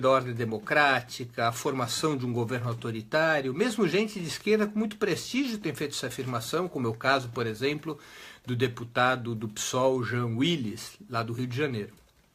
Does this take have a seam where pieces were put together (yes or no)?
yes